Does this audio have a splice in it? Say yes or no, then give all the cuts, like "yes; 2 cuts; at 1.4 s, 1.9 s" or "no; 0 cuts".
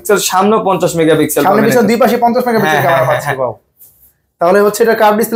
no; 0 cuts